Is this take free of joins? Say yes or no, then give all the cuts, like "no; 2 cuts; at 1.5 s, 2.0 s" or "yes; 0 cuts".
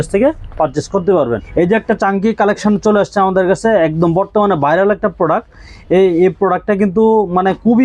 no; 1 cut; at 1.4 s